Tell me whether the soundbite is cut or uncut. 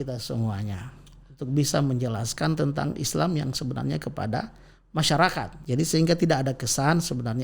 cut